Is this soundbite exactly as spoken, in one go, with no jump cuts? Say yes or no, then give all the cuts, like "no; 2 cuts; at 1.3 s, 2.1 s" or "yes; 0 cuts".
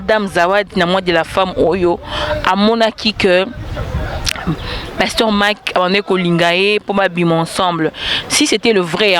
yes; 0 cuts